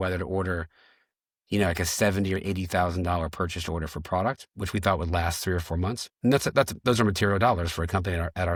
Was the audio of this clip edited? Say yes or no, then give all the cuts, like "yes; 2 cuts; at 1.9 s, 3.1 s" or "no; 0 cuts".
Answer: no; 0 cuts